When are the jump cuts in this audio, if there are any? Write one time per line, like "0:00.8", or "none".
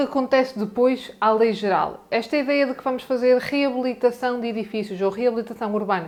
none

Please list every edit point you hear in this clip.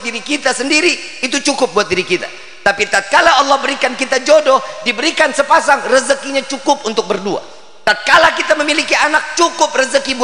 none

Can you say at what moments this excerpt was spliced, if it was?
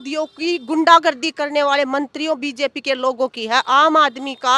none

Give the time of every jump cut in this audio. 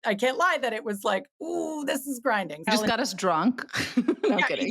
0:02.7

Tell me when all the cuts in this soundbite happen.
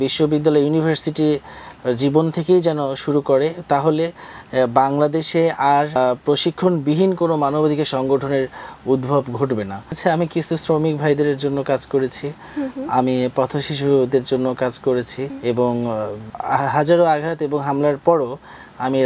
0:06.0
0:10.0
0:15.2
0:16.3

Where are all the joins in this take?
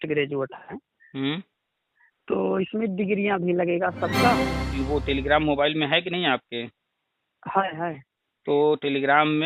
0:04.8

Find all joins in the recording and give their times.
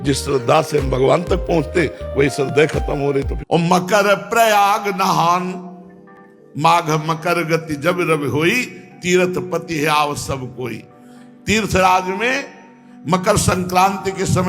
0:03.4

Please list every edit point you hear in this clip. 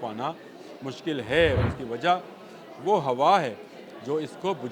0:01.6

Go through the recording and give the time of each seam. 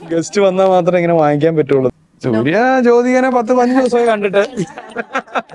0:01.9

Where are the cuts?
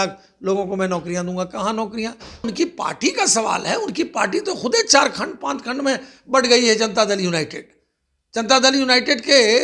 0:02.5

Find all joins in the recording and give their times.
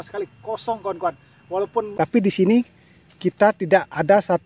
0:01.9

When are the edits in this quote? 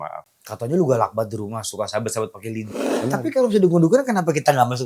0:02.7

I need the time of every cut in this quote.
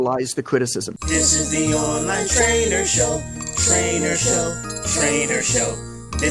0:01.0

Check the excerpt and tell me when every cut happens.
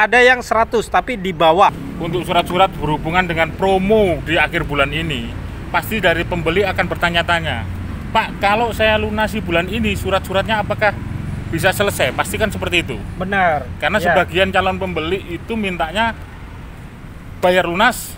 0:01.9

